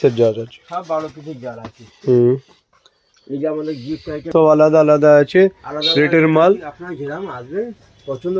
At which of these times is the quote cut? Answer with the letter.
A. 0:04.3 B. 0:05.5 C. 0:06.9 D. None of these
A